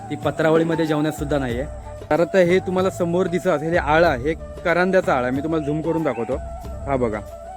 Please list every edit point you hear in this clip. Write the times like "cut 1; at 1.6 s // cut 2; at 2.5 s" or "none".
cut 1; at 1.9 s